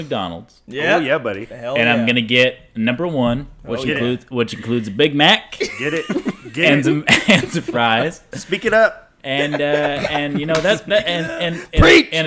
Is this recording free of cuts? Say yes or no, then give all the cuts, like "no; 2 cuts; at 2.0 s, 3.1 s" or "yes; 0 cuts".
yes; 0 cuts